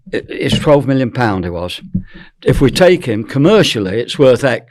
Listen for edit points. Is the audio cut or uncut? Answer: uncut